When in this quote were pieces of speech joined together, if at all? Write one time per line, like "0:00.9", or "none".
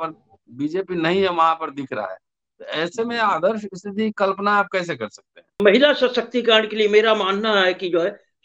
0:05.6